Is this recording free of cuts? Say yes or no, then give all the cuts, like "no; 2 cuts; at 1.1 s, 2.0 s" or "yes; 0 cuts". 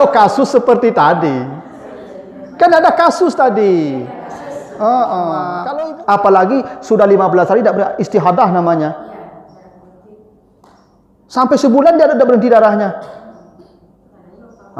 no; 1 cut; at 5.6 s